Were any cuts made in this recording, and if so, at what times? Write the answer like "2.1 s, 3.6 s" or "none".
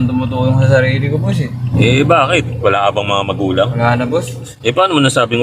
4.4 s

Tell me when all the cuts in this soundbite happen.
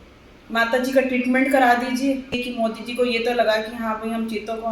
2.4 s

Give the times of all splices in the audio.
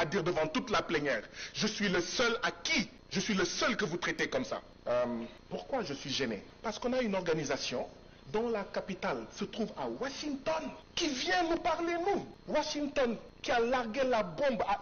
3.0 s, 4.7 s, 5.4 s, 6.5 s, 10.8 s, 12.3 s, 13.3 s

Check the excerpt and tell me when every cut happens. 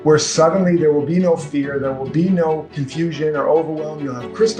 2.8 s

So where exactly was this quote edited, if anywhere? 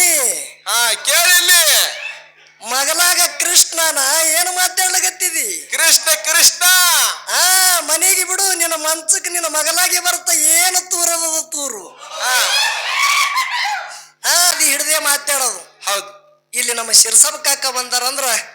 14.5 s

